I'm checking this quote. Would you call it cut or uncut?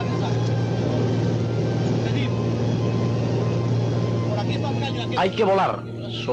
uncut